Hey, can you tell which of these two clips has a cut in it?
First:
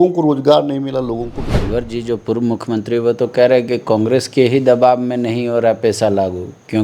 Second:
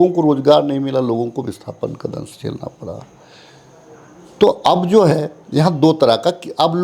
first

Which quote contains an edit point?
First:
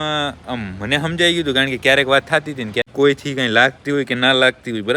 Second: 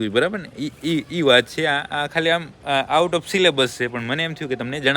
first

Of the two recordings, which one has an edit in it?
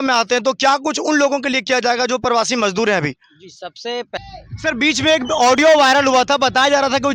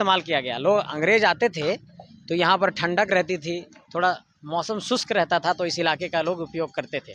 first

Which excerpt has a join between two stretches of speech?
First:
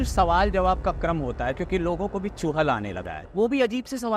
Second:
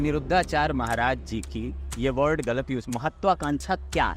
first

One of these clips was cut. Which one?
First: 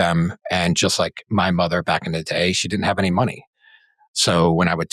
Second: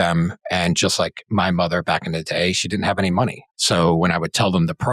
second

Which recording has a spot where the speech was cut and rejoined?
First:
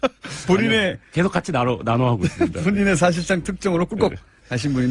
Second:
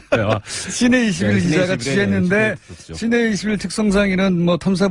second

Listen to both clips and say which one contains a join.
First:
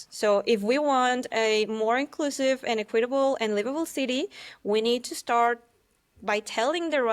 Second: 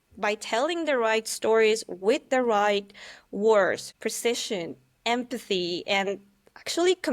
second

